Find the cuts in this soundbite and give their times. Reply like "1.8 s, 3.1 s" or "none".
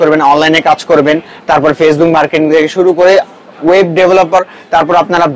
none